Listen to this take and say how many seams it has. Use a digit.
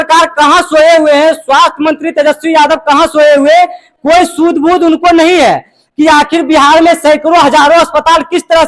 0